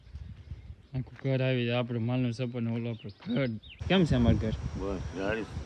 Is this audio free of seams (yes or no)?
no